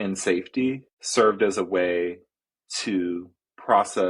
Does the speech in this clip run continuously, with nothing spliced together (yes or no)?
no